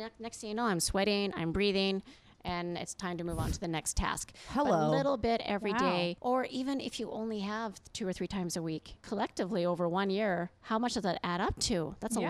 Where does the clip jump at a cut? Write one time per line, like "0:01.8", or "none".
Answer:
0:06.2
0:09.0